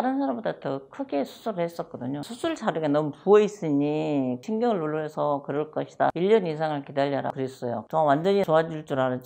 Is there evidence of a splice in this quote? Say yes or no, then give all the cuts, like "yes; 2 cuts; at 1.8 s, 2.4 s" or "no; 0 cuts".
no; 0 cuts